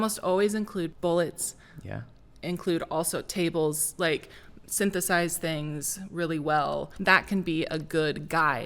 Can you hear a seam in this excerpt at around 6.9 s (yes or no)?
yes